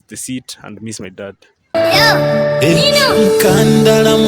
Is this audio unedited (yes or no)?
no